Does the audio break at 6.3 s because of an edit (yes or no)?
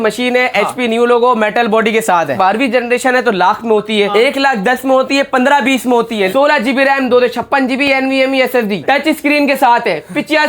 yes